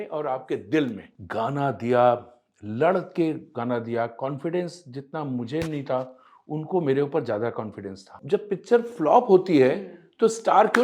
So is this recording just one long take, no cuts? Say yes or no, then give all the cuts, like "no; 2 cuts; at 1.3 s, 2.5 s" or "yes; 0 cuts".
no; 2 cuts; at 1.1 s, 8.1 s